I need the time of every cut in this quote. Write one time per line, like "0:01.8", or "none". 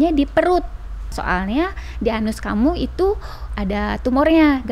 0:01.1